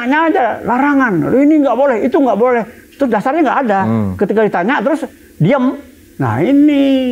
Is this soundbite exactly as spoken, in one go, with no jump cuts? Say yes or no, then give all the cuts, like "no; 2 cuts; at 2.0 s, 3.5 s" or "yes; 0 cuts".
yes; 0 cuts